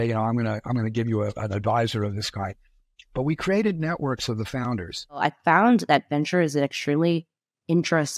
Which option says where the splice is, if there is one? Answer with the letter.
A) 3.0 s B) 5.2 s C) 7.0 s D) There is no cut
B